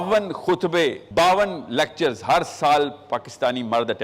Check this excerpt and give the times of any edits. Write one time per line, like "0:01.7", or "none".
0:01.0